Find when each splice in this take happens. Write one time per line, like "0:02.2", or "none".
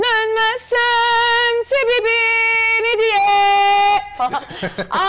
none